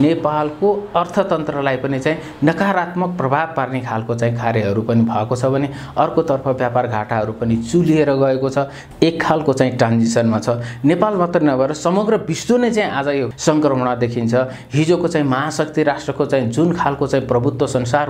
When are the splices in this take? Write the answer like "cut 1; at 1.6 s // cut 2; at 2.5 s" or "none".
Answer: cut 1; at 8.8 s // cut 2; at 13.3 s